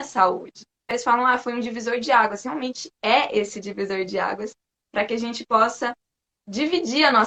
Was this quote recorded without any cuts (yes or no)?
no